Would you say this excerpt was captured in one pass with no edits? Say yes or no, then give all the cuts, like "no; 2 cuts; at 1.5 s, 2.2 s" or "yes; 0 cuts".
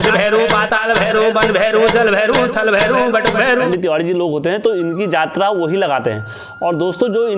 no; 1 cut; at 3.7 s